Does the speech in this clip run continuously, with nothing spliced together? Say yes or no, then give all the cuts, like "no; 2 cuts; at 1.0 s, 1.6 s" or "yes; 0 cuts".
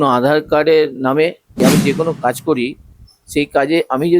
no; 1 cut; at 1.5 s